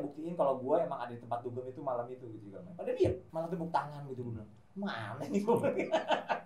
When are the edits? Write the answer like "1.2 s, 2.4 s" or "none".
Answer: 3.2 s